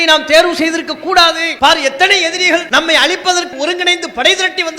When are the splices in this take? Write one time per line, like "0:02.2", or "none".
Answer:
0:01.5
0:02.7
0:03.5